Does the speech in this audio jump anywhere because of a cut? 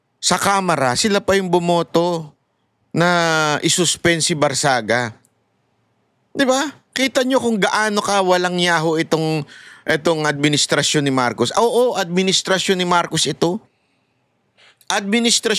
no; 0 cuts

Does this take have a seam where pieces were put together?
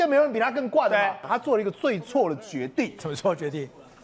yes; 1 cut; at 1.3 s

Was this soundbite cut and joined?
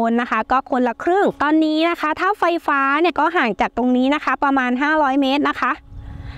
yes; 2 cuts; at 1.4 s, 3.1 s

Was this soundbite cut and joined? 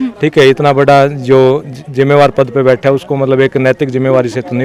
no; 0 cuts

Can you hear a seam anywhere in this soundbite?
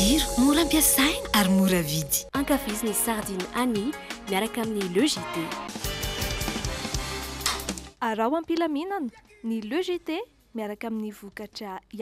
no; 0 cuts

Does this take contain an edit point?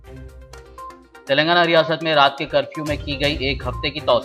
yes; 1 cut; at 0.9 s

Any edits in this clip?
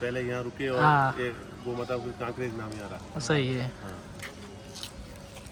no; 0 cuts

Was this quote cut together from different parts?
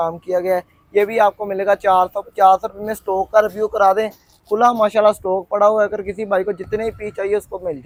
no; 0 cuts

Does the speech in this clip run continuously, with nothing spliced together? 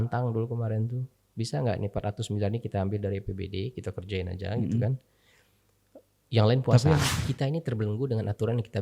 no; 1 cut; at 7.2 s

